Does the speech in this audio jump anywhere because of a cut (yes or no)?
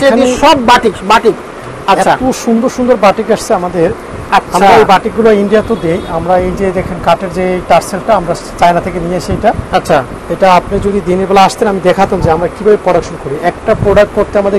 no